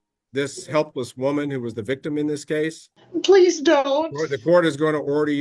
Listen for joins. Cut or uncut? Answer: cut